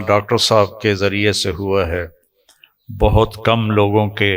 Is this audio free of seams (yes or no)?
yes